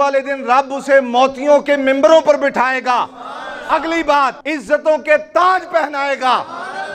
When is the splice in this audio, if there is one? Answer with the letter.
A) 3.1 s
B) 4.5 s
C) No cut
B